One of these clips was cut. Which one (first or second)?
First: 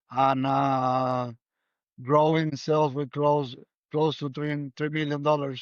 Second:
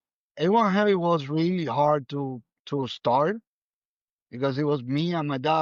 first